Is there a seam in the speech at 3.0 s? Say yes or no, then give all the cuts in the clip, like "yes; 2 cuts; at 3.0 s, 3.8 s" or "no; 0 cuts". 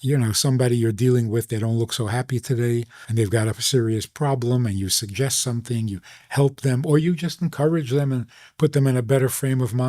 yes; 1 cut; at 3.0 s